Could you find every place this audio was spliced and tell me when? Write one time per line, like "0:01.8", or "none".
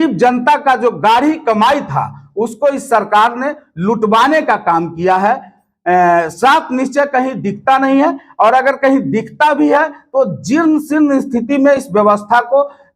none